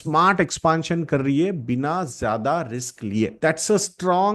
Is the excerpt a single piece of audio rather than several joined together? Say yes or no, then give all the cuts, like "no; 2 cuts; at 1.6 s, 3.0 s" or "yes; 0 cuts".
no; 1 cut; at 3.3 s